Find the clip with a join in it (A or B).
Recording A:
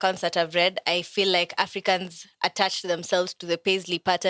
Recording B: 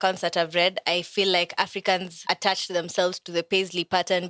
B